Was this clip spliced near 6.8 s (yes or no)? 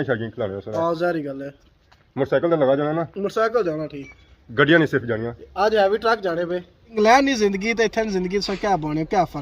yes